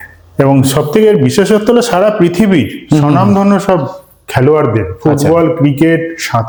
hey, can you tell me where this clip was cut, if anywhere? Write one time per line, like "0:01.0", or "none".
none